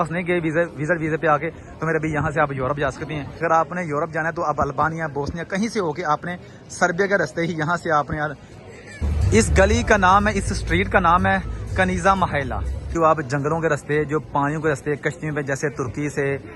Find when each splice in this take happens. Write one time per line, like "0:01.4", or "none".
0:03.4
0:09.1
0:12.9